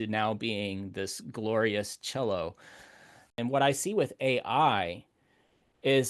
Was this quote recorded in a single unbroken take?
no; 1 cut; at 3.3 s

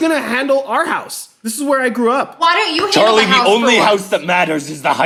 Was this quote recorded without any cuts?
yes; 0 cuts

